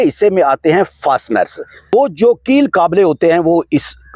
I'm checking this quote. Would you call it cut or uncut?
cut